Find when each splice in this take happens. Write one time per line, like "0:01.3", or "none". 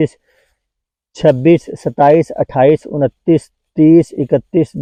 none